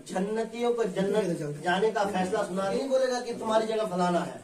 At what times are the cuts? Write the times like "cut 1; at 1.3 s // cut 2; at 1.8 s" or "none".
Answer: cut 1; at 2.6 s